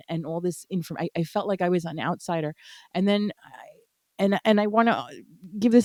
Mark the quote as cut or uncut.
uncut